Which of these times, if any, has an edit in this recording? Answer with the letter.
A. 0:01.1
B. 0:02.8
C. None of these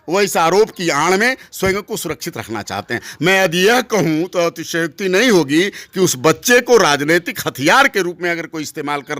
C